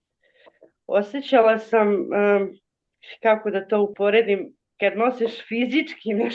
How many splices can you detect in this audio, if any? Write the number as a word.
one